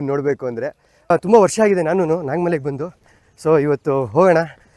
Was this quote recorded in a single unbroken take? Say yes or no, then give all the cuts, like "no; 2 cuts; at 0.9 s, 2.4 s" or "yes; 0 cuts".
no; 1 cut; at 1.1 s